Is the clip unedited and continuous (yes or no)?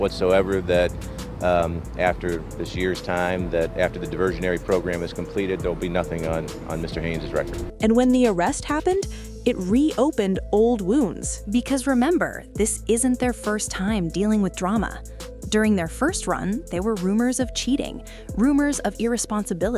yes